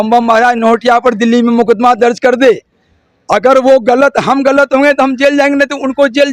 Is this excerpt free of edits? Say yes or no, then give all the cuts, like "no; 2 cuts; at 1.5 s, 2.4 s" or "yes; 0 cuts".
yes; 0 cuts